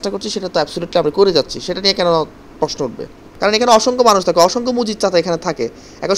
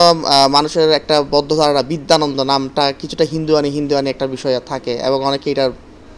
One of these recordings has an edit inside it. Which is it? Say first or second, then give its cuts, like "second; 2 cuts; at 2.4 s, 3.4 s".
first; 1 cut; at 3.2 s